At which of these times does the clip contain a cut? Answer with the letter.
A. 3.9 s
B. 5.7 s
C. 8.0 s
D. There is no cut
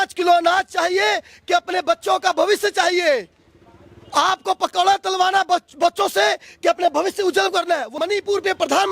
C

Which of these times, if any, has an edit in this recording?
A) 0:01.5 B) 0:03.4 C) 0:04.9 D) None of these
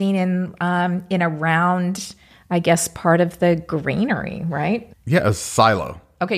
C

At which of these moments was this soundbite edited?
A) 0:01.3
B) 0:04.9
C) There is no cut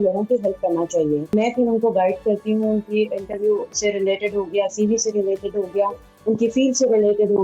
A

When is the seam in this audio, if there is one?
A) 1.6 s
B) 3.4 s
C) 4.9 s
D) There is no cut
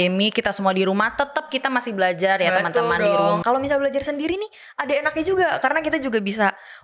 B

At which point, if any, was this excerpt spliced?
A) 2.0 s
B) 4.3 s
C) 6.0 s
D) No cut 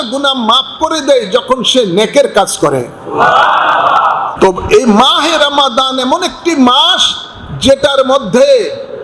B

